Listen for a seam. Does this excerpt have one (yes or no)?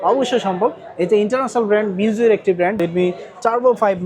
yes